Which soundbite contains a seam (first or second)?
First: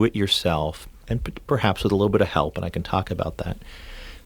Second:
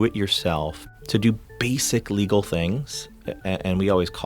second